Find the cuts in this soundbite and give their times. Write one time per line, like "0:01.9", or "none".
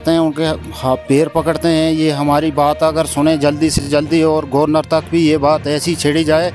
none